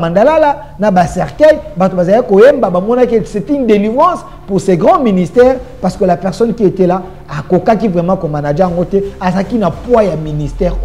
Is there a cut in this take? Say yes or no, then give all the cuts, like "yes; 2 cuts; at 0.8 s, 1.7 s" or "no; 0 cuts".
no; 0 cuts